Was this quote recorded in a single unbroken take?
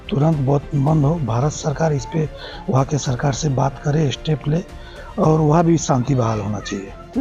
yes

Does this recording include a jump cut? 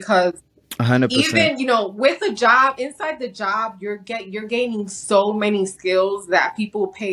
no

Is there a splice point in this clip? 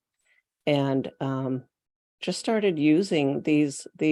no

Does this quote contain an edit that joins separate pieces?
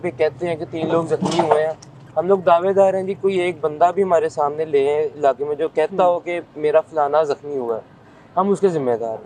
no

